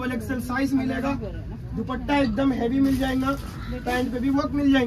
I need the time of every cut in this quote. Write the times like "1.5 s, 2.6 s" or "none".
none